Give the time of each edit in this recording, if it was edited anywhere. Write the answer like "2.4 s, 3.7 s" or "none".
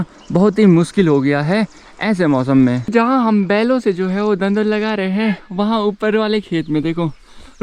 2.9 s